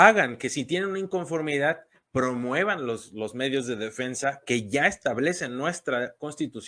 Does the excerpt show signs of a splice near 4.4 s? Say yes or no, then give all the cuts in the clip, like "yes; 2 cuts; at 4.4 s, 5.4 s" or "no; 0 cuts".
no; 0 cuts